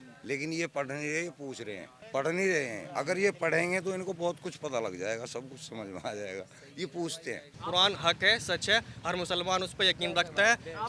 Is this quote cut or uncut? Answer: cut